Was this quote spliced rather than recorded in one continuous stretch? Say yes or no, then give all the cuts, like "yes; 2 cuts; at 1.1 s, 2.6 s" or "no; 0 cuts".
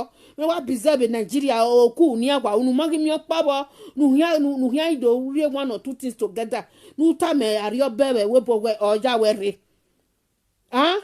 no; 0 cuts